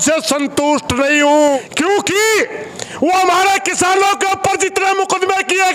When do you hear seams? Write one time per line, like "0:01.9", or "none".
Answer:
0:01.6